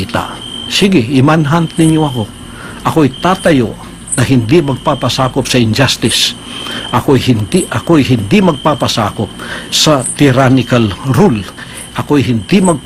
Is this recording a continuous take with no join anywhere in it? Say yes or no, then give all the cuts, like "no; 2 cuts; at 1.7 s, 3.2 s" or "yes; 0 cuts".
yes; 0 cuts